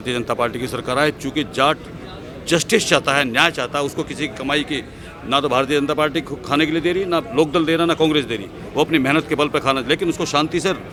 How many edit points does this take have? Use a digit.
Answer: 0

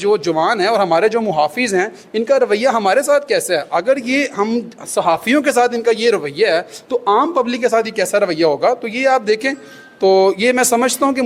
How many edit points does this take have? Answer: 0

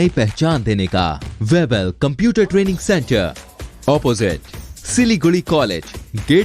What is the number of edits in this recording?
1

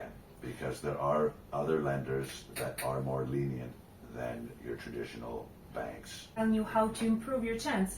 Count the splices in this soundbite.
1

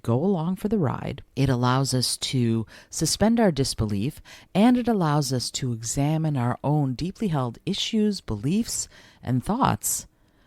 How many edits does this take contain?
1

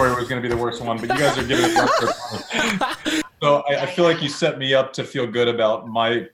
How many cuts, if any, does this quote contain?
1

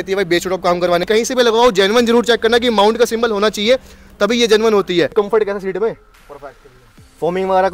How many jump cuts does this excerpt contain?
2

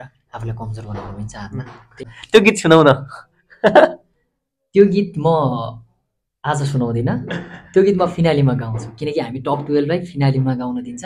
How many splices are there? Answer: 1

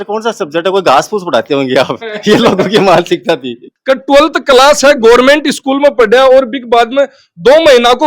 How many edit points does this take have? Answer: 1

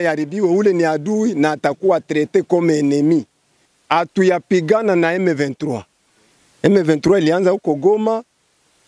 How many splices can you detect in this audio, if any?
1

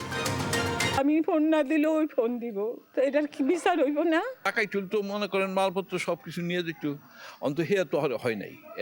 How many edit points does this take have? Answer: 3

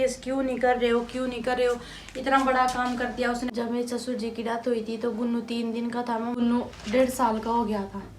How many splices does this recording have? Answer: 2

